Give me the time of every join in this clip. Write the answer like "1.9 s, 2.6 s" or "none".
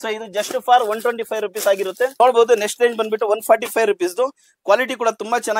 2.1 s